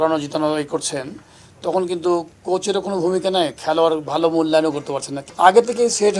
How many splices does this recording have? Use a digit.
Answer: 1